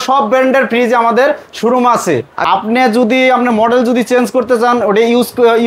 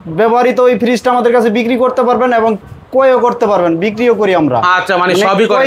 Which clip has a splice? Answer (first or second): first